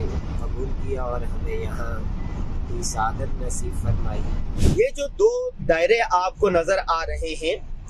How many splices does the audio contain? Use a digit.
1